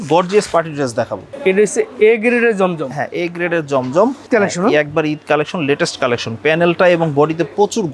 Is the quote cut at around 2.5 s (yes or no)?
no